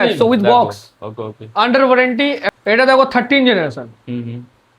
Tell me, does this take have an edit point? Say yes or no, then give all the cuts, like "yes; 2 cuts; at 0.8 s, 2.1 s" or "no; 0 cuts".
yes; 1 cut; at 2.4 s